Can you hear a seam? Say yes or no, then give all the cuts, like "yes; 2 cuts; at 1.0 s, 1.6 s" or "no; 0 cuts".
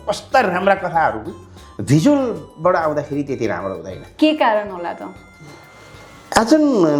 no; 0 cuts